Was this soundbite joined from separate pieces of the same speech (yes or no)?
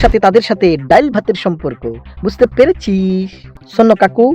yes